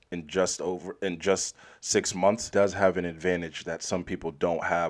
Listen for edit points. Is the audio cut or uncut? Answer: cut